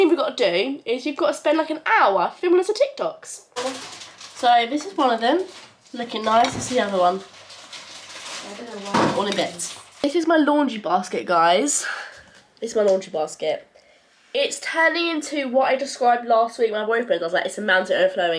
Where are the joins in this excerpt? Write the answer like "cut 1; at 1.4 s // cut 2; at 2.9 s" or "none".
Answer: cut 1; at 3.5 s // cut 2; at 10.0 s